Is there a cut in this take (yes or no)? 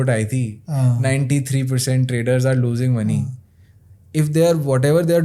no